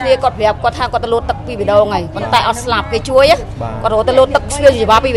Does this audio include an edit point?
no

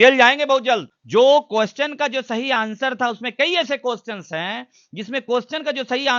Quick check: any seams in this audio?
yes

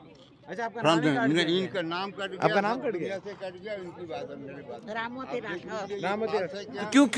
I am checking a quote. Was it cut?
no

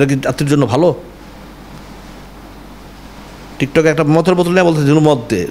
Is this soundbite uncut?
yes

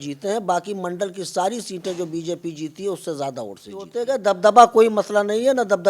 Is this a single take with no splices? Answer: no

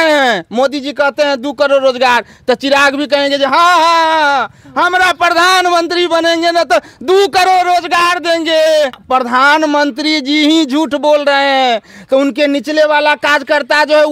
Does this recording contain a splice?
yes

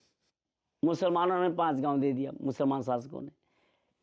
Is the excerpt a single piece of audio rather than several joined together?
yes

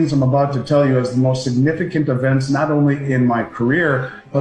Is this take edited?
no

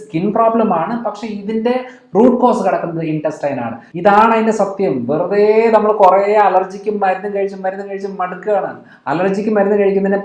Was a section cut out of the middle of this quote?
yes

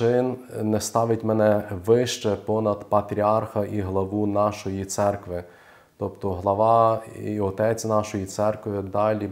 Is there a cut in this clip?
no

